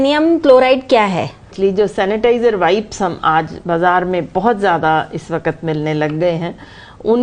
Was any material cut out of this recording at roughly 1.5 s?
yes; 1 cut; at 1.5 s

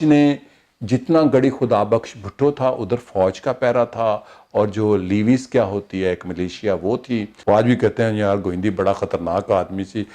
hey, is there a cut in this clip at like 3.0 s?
no; 1 cut; at 7.3 s

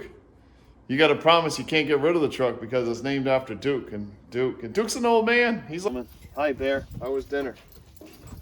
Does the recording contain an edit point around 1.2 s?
no; 1 cut; at 5.9 s

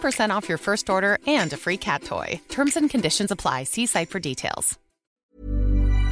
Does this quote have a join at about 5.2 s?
yes; 1 cut; at 5.2 s

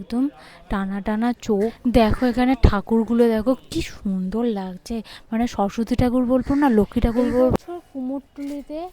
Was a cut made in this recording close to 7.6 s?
yes; 2 cuts; at 1.9 s, 7.6 s

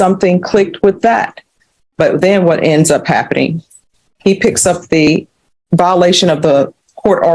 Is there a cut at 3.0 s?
no; 1 cut; at 5.1 s

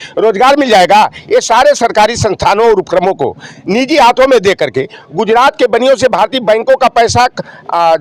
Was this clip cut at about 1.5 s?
no; 0 cuts

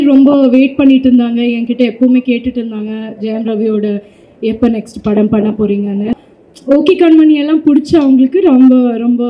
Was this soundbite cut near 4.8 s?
no; 1 cut; at 6.2 s

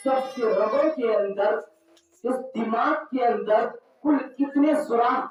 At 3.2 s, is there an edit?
no; 0 cuts

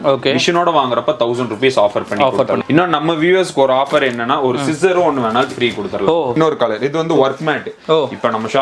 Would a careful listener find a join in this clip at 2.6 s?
yes; 2 cuts; at 2.6 s, 6.4 s

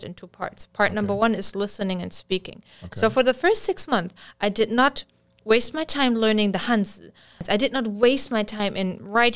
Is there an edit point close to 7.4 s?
yes; 1 cut; at 7.4 s

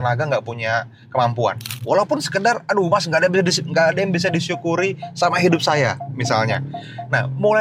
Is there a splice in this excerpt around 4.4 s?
no; 1 cut; at 1.7 s

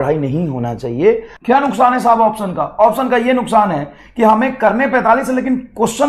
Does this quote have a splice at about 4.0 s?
no; 1 cut; at 1.3 s

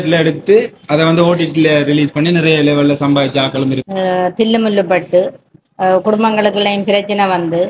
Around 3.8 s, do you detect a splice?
yes; 1 cut; at 3.8 s

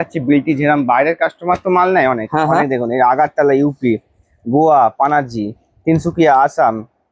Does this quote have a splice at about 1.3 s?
no; 0 cuts

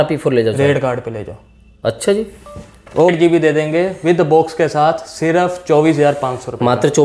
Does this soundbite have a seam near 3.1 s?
yes; 1 cut; at 3.1 s

